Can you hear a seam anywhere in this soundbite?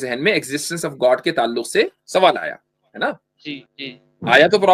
yes; 1 cut; at 3.7 s

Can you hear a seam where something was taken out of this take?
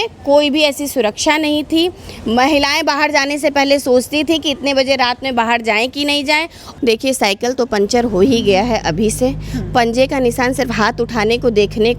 yes; 1 cut; at 6.6 s

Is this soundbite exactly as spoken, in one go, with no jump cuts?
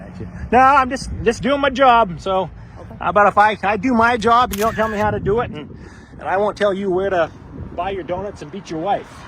yes; 0 cuts

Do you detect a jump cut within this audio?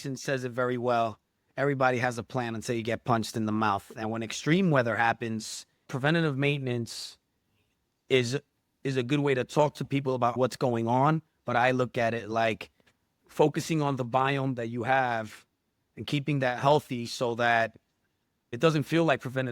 yes; 3 cuts; at 5.9 s, 10.3 s, 18.5 s

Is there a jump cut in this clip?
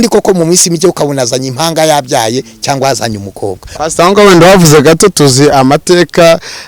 yes; 1 cut; at 3.8 s

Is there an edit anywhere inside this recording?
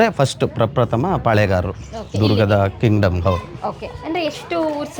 no; 0 cuts

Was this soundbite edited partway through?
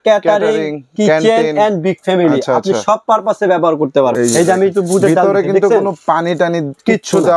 yes; 1 cut; at 4.1 s

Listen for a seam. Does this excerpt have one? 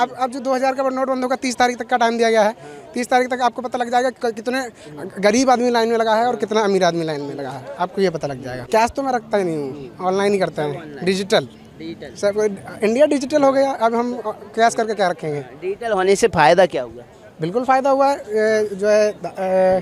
no; 0 cuts

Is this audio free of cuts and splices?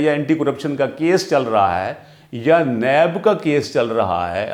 yes; 0 cuts

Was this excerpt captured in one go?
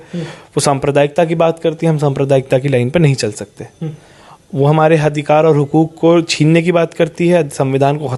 yes; 0 cuts

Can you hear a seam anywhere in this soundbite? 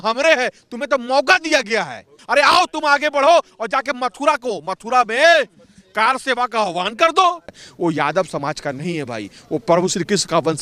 yes; 2 cuts; at 2.2 s, 7.5 s

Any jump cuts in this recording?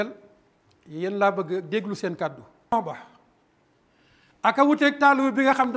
yes; 1 cut; at 2.7 s

